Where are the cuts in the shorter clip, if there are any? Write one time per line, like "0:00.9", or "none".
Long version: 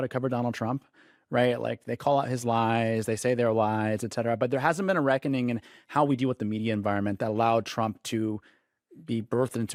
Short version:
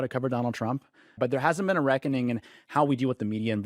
0:01.2